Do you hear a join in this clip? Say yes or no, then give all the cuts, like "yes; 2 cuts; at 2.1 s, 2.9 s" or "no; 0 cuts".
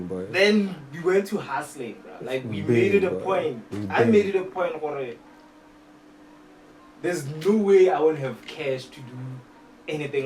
no; 0 cuts